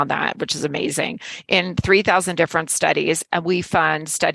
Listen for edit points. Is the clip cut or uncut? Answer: uncut